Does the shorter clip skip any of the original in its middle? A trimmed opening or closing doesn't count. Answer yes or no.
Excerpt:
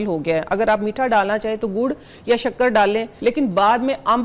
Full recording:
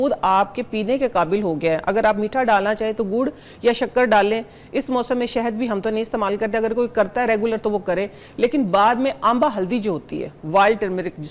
yes